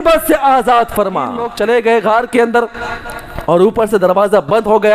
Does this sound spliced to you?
yes; 1 cut; at 1.5 s

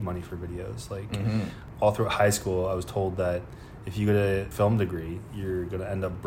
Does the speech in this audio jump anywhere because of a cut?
yes; 2 cuts; at 1.6 s, 4.5 s

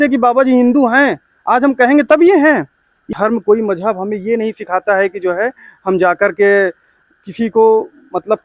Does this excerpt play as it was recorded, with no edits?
no; 1 cut; at 3.1 s

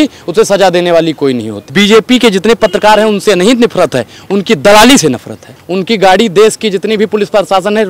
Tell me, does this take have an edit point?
yes; 2 cuts; at 1.6 s, 5.6 s

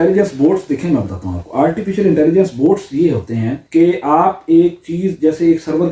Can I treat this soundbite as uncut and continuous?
no; 1 cut; at 3.6 s

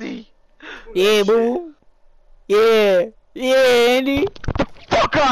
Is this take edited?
no; 0 cuts

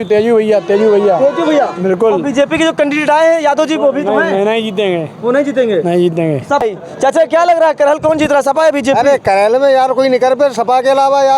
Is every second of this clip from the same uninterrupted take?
no; 1 cut; at 6.6 s

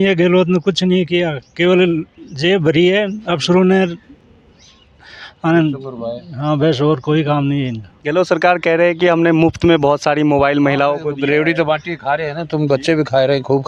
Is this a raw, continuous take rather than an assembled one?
yes; 0 cuts

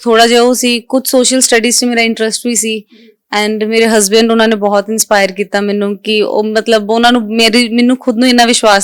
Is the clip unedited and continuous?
yes; 0 cuts

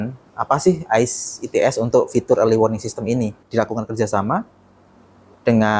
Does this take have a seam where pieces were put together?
yes; 1 cut; at 3.4 s

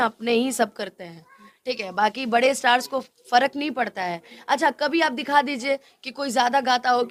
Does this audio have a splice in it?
no; 0 cuts

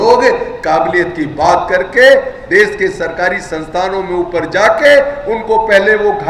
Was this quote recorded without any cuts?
yes; 0 cuts

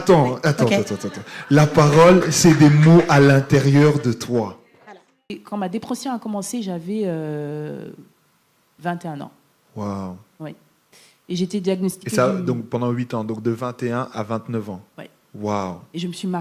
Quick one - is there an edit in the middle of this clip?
yes; 1 cut; at 5.4 s

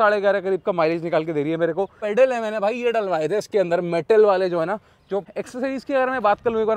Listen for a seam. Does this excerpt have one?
yes; 2 cuts; at 2.0 s, 5.3 s

